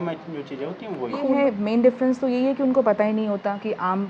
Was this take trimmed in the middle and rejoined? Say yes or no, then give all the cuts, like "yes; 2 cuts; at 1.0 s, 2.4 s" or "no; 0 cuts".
yes; 1 cut; at 1.3 s